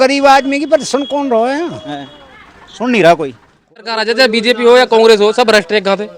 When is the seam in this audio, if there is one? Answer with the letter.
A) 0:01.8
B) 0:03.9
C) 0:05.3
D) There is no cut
B